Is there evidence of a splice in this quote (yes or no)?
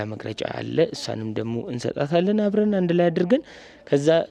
no